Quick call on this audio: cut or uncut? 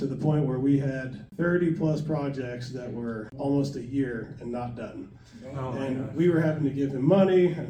uncut